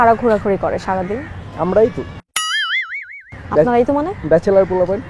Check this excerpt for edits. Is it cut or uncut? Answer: uncut